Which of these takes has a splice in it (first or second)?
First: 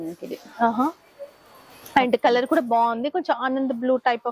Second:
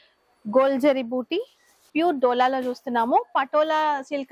second